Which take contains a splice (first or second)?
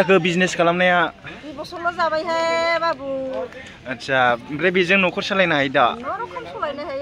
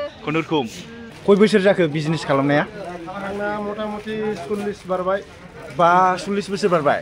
second